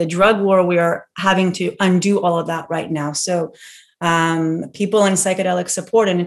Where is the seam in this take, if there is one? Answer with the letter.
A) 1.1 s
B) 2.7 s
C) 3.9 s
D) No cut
D